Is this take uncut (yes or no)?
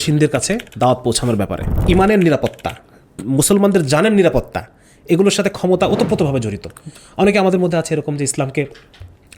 no